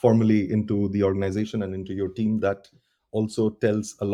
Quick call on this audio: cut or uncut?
uncut